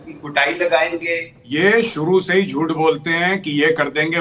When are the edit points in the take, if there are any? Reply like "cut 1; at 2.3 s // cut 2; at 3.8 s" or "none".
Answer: cut 1; at 1.3 s